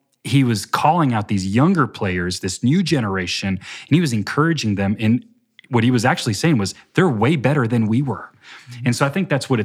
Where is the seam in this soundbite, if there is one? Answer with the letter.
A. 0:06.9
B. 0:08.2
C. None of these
C